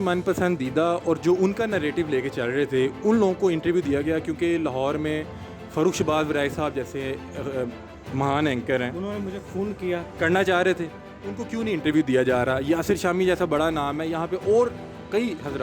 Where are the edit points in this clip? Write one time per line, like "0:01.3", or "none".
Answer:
none